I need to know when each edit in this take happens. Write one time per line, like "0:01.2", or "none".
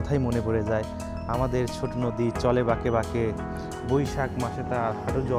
none